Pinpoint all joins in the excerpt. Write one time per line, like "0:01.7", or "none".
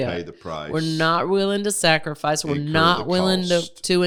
none